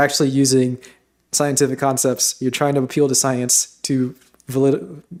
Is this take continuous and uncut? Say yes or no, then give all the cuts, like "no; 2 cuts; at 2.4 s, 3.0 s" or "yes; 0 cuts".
yes; 0 cuts